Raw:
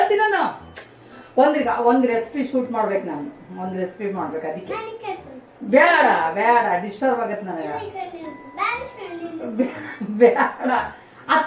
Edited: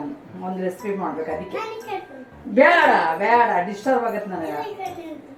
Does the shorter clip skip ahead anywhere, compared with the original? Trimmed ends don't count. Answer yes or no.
no